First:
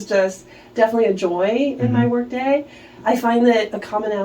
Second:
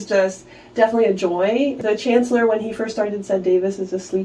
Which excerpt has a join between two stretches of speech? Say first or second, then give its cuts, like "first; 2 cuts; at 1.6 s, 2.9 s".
second; 1 cut; at 1.8 s